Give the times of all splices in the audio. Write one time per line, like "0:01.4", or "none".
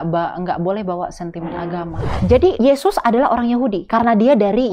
0:02.4
0:03.8